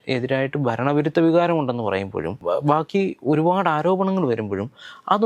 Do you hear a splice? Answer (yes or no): yes